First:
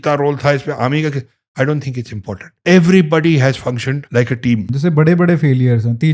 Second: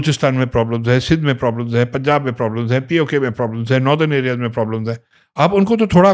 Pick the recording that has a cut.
first; 3 cuts; at 2.5 s, 4.0 s, 4.7 s

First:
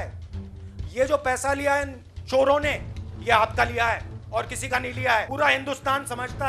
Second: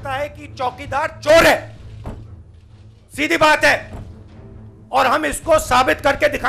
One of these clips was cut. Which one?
first; 1 cut; at 5.3 s

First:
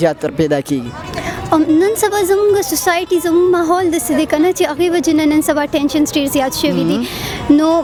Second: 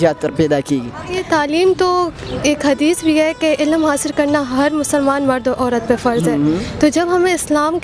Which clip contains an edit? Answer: second; 1 cut; at 1.2 s

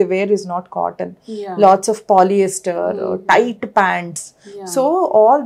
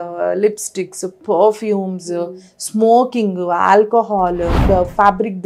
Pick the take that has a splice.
second; 1 cut; at 4.5 s

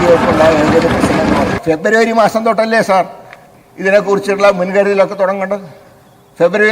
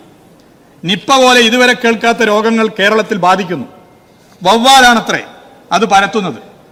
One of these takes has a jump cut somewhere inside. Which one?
first; 1 cut; at 1.5 s

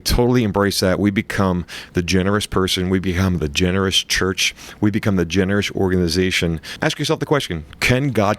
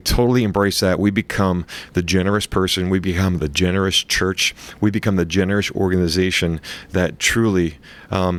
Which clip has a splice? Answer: first; 1 cut; at 6.7 s

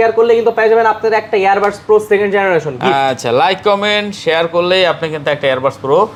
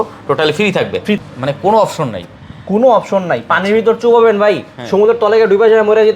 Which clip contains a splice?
second; 1 cut; at 1.2 s

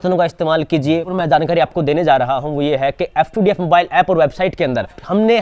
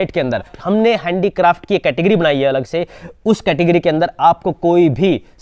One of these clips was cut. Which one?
first; 1 cut; at 1.1 s

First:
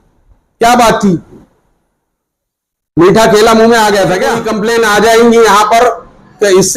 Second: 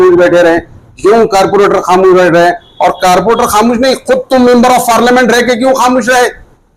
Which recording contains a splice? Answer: first; 1 cut; at 4.5 s

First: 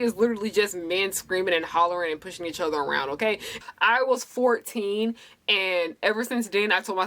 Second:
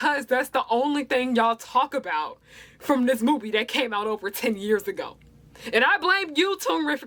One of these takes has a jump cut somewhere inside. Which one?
first; 1 cut; at 3.5 s

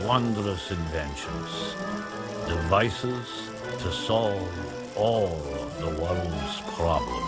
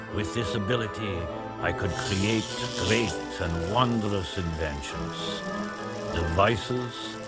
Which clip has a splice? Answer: first; 1 cut; at 5.4 s

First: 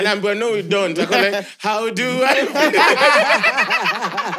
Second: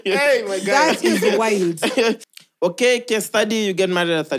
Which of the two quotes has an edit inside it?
second; 1 cut; at 2.3 s

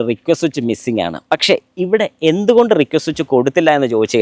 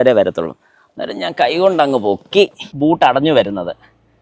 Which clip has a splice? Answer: second; 1 cut; at 2.6 s

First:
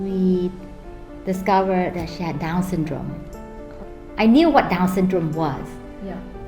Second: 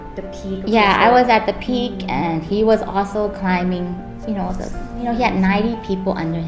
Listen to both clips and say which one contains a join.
first; 1 cut; at 3.8 s

